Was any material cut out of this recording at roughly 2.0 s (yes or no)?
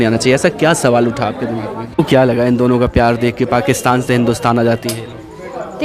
yes